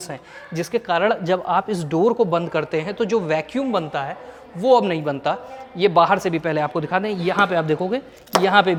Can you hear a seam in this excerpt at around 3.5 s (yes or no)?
no